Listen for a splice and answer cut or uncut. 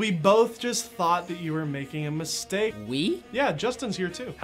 cut